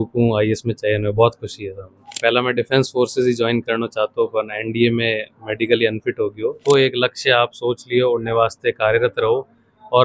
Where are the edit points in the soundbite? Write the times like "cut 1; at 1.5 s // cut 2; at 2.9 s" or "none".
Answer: cut 1; at 2.1 s // cut 2; at 6.6 s